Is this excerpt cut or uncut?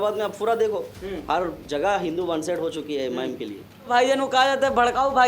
cut